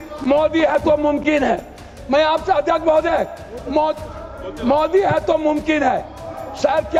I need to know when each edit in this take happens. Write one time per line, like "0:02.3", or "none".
none